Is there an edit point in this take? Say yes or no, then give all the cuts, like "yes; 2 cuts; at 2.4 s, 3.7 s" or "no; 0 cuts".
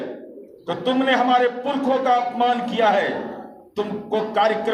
no; 0 cuts